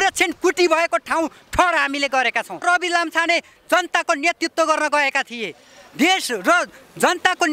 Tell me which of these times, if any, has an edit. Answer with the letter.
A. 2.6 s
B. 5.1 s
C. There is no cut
A